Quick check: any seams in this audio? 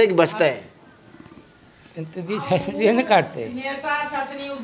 no; 0 cuts

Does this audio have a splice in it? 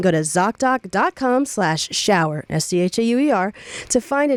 no; 0 cuts

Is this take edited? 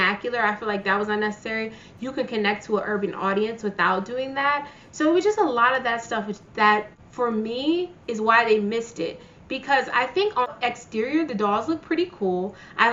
no; 0 cuts

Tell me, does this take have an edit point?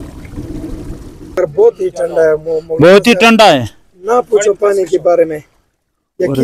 yes; 1 cut; at 1.4 s

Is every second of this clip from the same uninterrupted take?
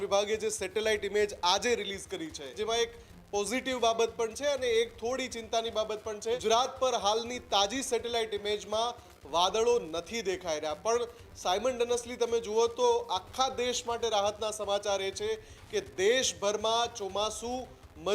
no; 2 cuts; at 2.5 s, 6.4 s

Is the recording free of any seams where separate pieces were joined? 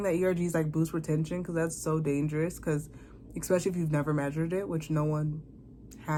yes; 0 cuts

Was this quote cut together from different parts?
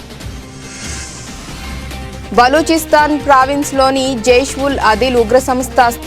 yes; 1 cut; at 1.4 s

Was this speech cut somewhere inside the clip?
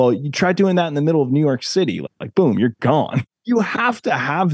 yes; 1 cut; at 3.2 s

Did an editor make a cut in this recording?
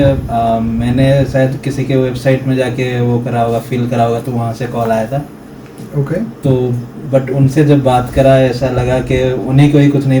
no; 0 cuts

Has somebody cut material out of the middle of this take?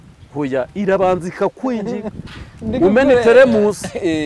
no; 0 cuts

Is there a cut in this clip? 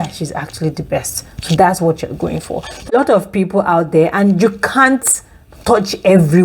yes; 1 cut; at 2.9 s

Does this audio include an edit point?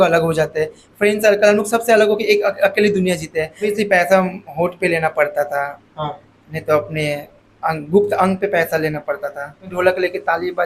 yes; 2 cuts; at 3.7 s, 9.7 s

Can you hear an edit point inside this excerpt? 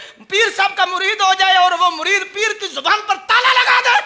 no; 0 cuts

